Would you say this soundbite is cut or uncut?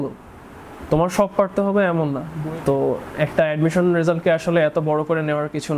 cut